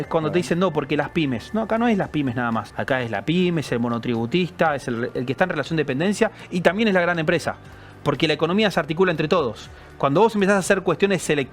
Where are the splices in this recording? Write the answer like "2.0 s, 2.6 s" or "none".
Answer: 2.7 s